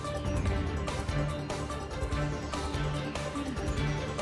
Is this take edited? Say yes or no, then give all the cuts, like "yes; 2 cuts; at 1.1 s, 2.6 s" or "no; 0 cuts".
no; 0 cuts